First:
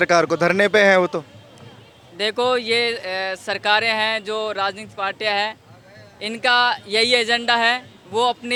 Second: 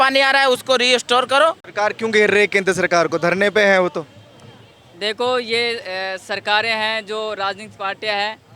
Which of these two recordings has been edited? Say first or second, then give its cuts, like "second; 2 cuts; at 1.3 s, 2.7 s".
second; 1 cut; at 1.6 s